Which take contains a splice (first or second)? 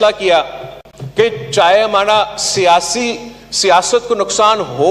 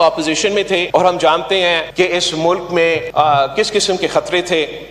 second